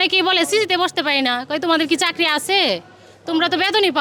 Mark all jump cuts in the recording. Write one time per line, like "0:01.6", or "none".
none